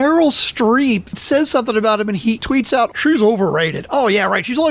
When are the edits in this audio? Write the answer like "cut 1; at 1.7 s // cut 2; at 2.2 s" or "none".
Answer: cut 1; at 1.1 s // cut 2; at 2.5 s